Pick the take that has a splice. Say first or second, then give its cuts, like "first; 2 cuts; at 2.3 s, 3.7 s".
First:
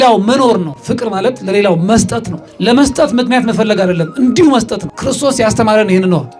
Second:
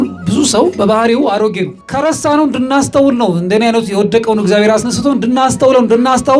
second; 1 cut; at 1.8 s